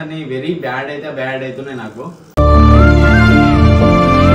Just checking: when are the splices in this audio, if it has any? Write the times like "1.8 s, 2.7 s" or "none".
2.2 s